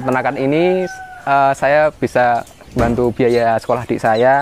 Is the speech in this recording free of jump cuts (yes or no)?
no